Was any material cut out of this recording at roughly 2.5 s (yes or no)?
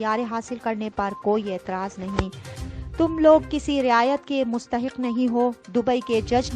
yes